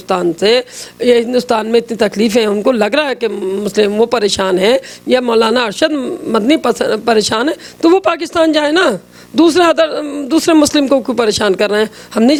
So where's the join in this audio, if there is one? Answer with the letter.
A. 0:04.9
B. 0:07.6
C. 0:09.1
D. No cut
D